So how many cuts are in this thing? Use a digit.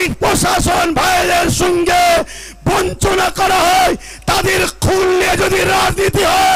0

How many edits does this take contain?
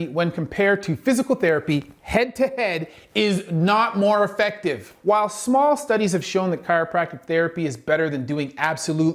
1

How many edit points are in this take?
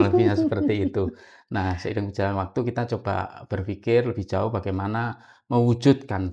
0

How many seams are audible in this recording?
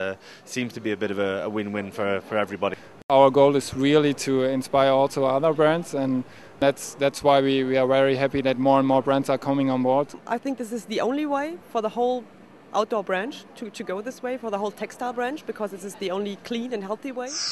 2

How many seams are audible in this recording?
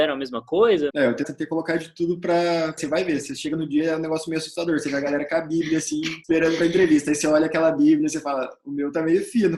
3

